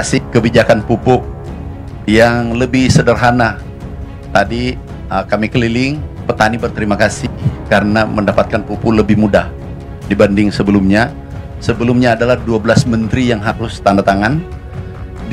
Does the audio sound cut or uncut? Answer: cut